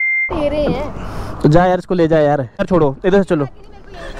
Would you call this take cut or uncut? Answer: cut